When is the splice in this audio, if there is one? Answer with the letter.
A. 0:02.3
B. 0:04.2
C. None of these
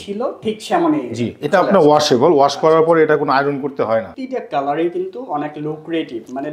B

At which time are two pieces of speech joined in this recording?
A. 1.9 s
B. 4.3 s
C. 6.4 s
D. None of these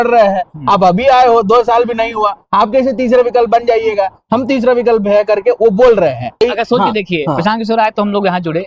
C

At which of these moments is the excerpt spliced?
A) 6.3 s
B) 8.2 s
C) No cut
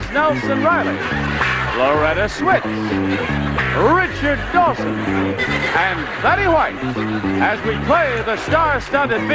C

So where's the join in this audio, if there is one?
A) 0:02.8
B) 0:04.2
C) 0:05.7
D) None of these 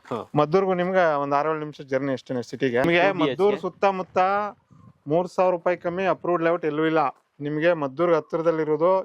A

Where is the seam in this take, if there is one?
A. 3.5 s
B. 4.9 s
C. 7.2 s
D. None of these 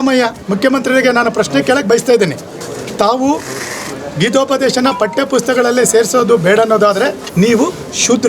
C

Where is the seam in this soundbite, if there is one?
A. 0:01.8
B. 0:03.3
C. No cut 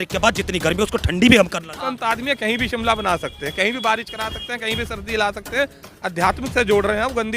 A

